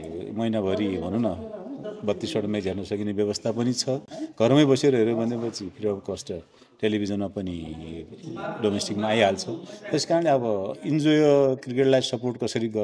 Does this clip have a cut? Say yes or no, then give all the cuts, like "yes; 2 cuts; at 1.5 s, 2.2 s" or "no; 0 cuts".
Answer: no; 0 cuts